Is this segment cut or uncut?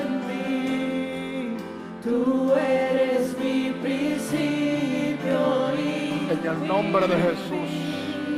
uncut